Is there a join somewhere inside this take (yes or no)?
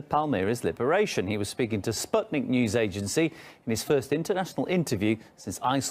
yes